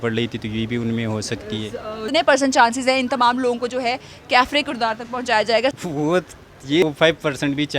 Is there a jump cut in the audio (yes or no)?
yes